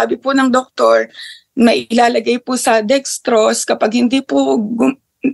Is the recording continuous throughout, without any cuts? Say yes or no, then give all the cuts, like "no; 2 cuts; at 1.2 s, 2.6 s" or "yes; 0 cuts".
yes; 0 cuts